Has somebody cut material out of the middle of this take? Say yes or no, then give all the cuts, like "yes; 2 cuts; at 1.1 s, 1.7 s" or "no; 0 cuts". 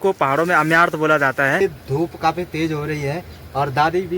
yes; 1 cut; at 1.6 s